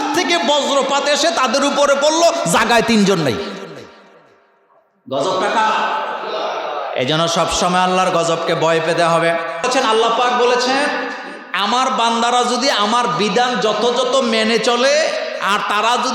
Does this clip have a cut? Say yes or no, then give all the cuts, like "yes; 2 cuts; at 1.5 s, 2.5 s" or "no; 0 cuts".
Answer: yes; 1 cut; at 9.8 s